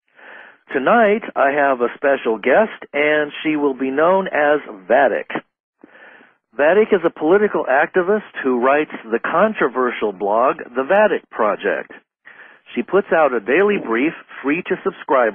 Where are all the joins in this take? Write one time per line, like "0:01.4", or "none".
none